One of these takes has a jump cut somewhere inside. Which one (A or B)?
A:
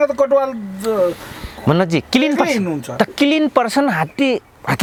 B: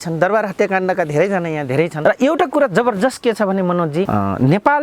B